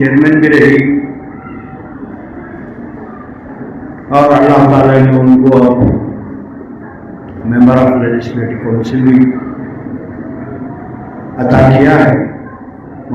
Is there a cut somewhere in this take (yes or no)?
no